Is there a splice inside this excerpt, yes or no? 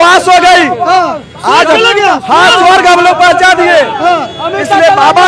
no